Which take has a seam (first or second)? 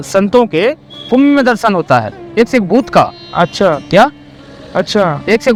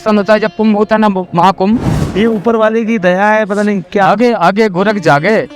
second